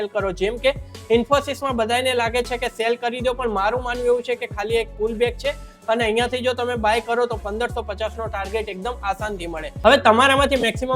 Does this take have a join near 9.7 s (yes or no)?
yes